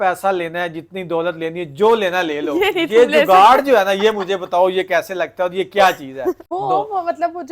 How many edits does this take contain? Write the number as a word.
one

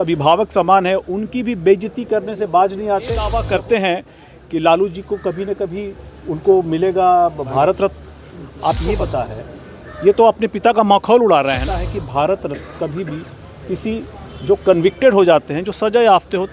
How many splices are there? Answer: three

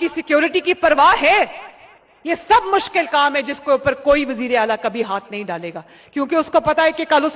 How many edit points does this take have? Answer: zero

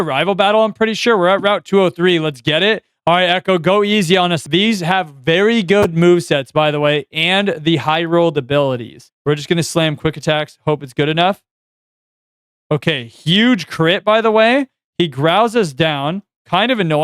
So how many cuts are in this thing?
three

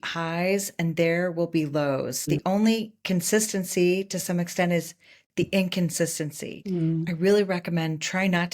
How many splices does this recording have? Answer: two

